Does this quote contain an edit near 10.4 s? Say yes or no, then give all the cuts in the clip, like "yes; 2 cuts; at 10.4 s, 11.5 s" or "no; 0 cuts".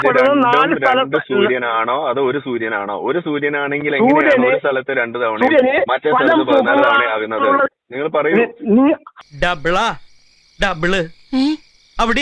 no; 1 cut; at 9.2 s